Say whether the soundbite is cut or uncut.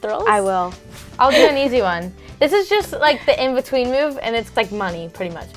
cut